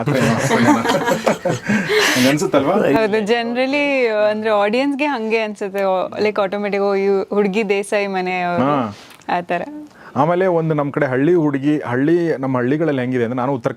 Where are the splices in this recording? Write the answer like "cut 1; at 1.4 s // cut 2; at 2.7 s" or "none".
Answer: none